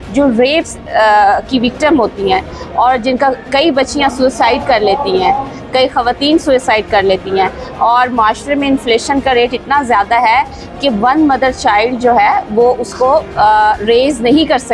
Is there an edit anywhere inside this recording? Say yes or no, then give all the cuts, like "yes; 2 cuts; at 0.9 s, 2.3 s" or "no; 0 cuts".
no; 0 cuts